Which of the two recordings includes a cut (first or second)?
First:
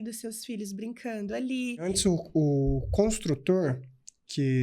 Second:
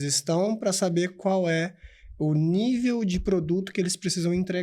first